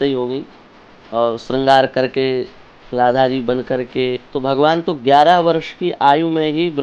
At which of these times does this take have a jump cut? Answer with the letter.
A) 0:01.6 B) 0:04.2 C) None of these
B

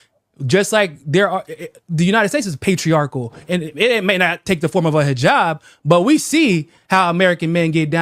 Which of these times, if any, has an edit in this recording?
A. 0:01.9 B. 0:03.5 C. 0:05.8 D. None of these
D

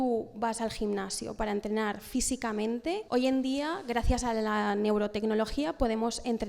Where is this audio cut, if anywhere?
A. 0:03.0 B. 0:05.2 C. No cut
A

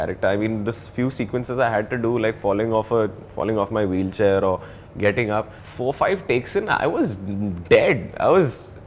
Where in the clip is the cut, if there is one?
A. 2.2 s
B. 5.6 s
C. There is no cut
B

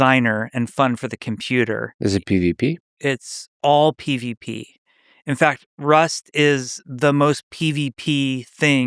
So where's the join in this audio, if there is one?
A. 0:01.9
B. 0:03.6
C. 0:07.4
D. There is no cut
A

